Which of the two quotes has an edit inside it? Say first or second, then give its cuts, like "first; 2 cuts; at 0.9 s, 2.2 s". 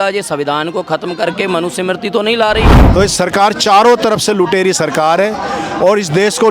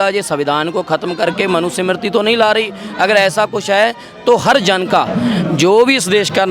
first; 1 cut; at 2.8 s